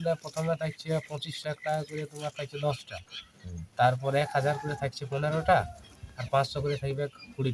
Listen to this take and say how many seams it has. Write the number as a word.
zero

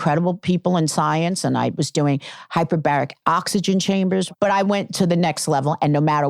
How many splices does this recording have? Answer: one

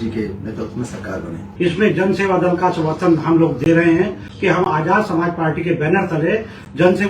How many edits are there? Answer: two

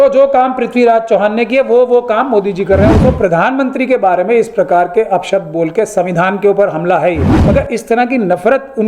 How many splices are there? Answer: two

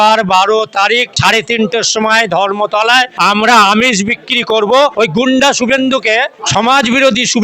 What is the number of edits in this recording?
four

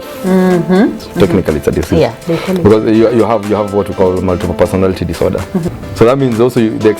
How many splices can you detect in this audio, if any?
two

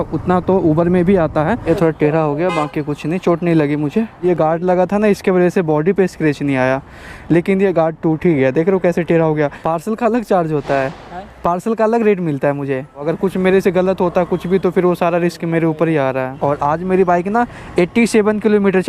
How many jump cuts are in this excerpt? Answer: five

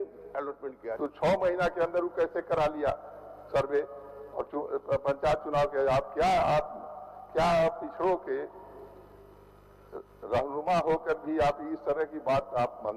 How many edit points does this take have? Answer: one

